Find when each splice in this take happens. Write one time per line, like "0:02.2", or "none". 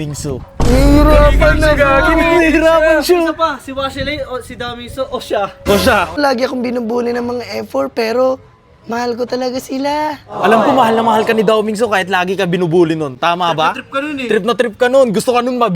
0:06.2